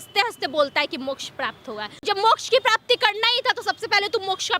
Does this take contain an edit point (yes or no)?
yes